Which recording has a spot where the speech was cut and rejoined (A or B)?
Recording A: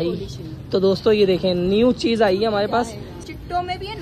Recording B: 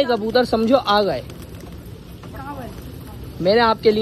A